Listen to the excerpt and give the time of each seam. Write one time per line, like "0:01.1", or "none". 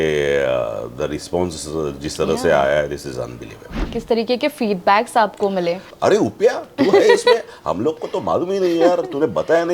0:03.8
0:05.9